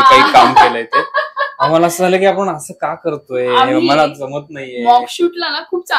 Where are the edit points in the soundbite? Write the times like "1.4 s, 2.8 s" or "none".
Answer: none